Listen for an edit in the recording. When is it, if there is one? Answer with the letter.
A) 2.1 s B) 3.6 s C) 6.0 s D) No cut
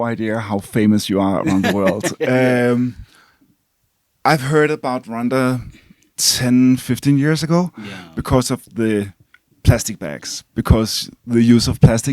D